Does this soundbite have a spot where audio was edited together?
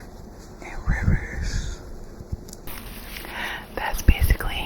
yes; 1 cut; at 2.7 s

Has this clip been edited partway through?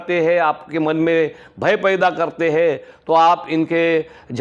no; 0 cuts

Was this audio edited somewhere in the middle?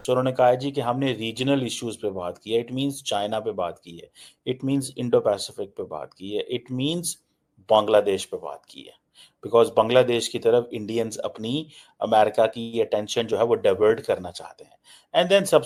no; 0 cuts

